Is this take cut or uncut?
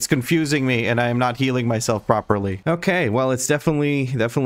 cut